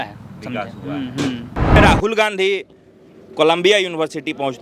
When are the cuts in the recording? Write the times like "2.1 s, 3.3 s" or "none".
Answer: 1.8 s